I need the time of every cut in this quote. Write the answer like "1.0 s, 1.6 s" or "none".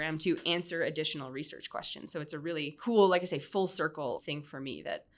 2.8 s, 4.2 s